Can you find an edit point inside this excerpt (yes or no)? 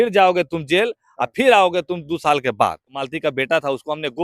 yes